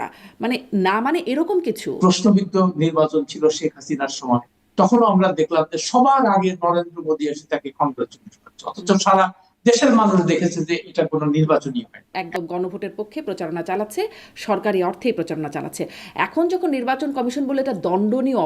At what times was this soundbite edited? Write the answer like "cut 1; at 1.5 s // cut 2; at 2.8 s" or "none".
cut 1; at 1.9 s // cut 2; at 12.2 s